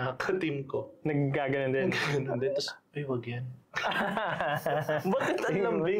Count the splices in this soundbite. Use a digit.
0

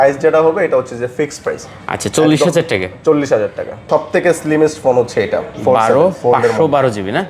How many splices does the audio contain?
1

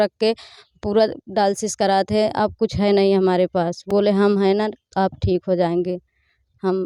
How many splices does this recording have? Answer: 0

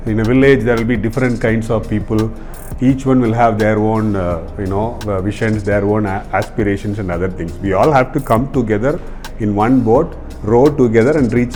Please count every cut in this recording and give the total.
0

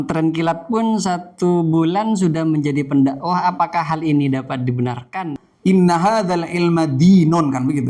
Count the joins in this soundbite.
1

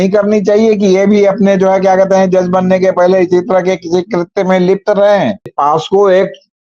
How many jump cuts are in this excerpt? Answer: 1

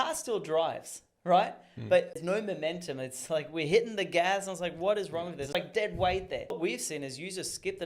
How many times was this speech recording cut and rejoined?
3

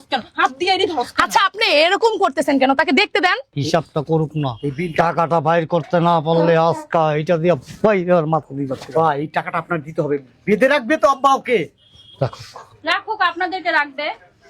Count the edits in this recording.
1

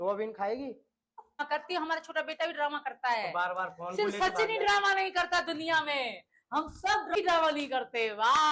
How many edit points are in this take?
2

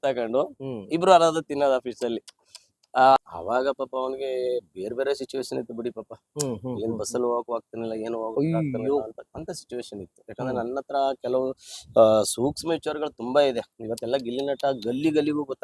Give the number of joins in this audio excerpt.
1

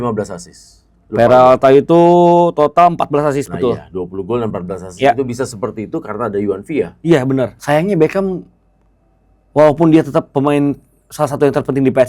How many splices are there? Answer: 1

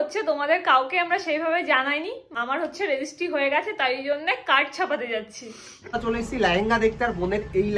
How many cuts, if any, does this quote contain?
2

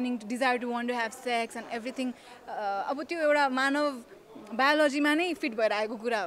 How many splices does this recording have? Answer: 0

